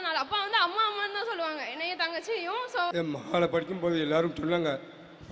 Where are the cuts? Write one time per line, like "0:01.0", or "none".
0:02.9